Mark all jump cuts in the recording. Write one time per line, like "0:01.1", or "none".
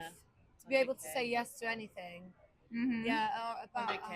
none